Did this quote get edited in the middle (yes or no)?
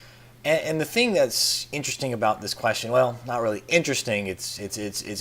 yes